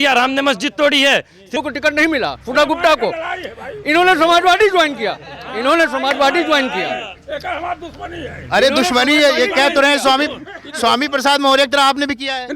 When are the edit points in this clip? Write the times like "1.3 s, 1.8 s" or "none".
1.6 s